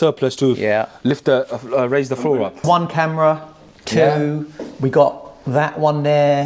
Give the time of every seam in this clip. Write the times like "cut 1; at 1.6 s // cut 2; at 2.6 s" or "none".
cut 1; at 2.6 s